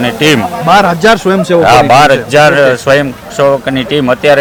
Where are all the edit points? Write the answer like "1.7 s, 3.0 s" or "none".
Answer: none